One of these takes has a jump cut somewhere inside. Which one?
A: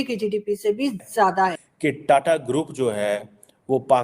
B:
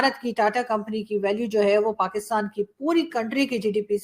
A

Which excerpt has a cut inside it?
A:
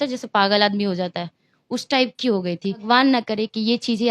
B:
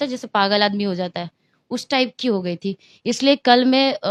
A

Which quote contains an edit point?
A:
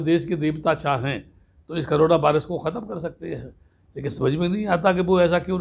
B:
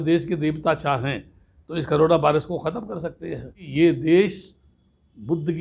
B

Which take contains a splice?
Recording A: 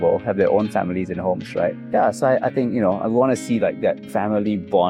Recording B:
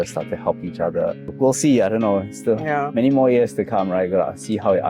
B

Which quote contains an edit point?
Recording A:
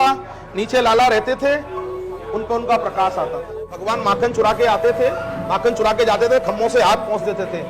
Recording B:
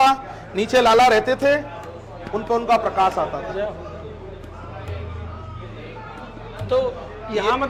A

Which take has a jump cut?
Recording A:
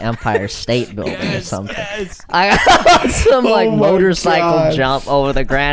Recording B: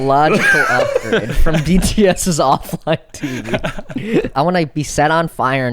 B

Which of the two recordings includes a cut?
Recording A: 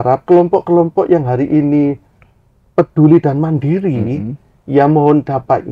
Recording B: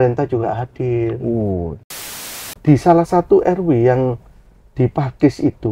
B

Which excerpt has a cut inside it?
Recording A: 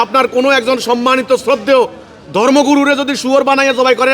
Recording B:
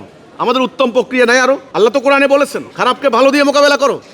B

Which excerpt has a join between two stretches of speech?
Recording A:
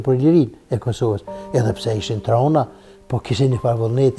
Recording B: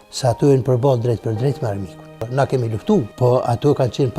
B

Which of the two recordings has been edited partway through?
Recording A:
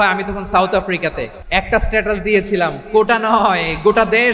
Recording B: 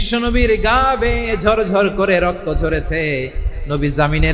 A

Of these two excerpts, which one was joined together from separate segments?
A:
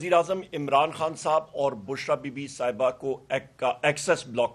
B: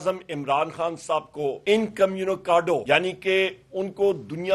B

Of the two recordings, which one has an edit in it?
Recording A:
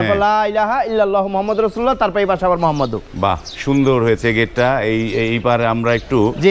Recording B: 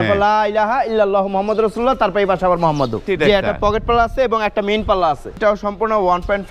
B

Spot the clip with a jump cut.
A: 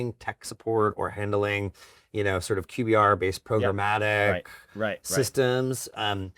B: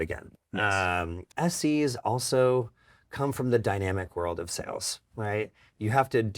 B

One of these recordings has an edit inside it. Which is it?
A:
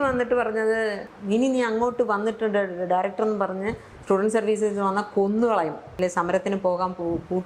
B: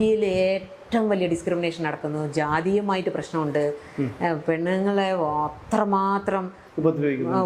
A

